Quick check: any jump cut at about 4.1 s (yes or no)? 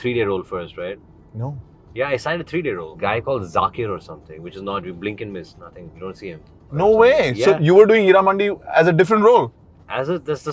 no